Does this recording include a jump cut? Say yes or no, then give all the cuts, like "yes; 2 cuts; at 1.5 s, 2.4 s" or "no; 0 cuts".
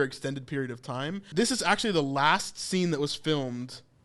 yes; 1 cut; at 1.2 s